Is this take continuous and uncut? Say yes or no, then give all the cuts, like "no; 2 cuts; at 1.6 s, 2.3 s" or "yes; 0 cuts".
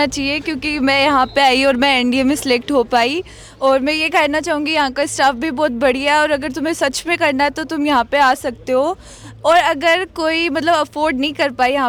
yes; 0 cuts